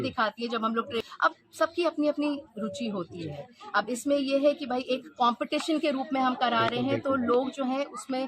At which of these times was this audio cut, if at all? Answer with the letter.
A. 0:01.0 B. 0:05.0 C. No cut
A